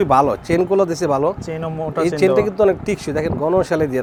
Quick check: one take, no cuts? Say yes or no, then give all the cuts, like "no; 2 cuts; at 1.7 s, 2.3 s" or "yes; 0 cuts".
yes; 0 cuts